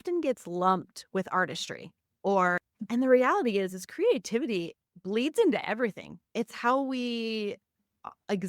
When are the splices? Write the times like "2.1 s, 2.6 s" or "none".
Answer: 2.6 s